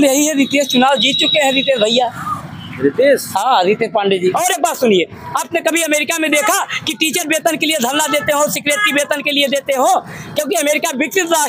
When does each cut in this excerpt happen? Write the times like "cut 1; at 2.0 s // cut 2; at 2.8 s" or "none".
cut 1; at 4.3 s